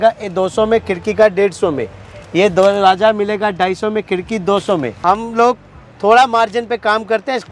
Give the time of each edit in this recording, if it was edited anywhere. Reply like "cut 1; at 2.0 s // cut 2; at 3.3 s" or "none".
cut 1; at 4.9 s